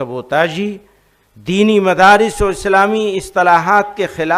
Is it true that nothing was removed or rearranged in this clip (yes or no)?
yes